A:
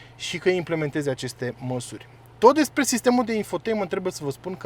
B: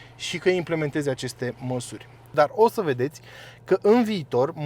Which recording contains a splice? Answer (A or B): B